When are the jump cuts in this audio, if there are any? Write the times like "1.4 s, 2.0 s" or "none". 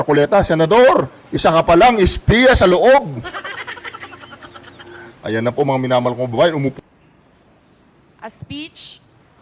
6.7 s

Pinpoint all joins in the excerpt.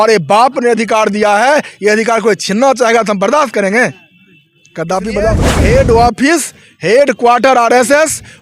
5.4 s

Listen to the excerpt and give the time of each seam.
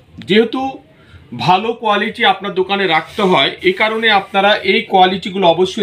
none

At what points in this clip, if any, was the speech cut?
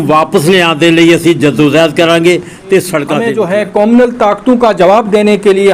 3.2 s

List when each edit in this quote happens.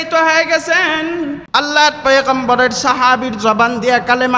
1.4 s

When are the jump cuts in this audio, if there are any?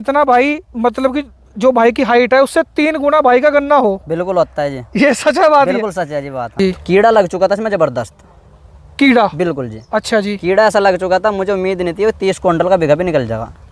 6.4 s

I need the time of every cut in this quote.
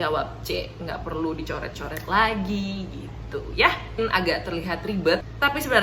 4.0 s

